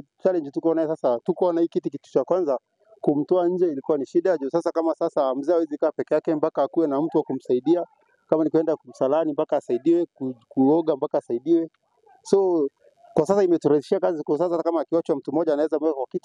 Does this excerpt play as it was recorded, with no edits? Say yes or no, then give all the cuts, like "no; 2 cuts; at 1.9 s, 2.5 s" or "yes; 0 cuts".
yes; 0 cuts